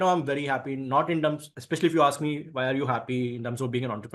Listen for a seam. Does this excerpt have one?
no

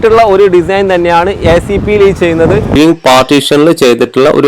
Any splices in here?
yes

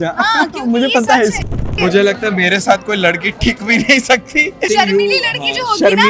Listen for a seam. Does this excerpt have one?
yes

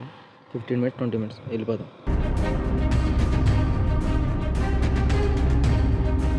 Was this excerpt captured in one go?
yes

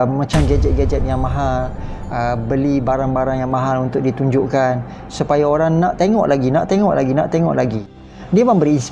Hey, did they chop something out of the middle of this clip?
yes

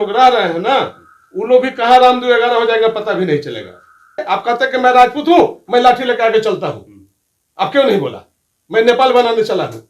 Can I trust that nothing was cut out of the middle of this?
no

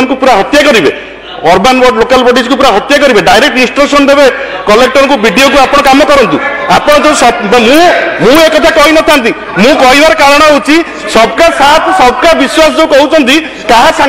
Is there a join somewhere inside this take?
no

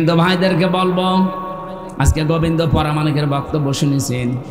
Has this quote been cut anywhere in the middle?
no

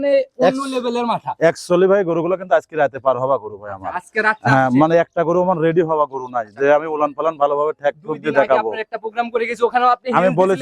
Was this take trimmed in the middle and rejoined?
no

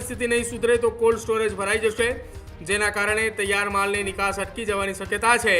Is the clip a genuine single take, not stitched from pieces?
yes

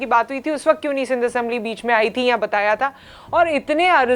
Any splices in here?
no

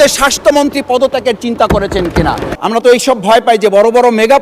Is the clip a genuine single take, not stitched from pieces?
no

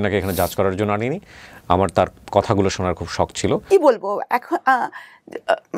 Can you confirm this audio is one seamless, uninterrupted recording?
no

